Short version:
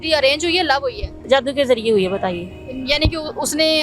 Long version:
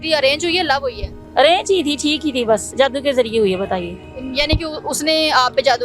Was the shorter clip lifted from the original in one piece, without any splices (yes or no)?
no